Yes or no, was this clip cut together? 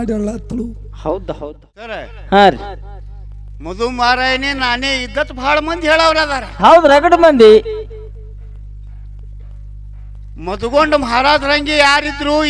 yes